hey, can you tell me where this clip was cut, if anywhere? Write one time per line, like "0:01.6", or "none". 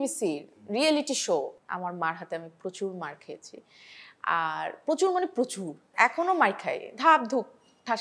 0:01.5
0:05.9